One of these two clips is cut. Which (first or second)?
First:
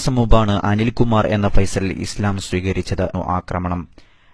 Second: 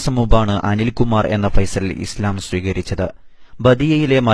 second